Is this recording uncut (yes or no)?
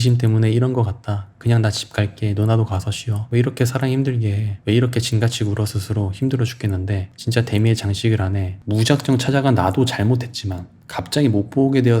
no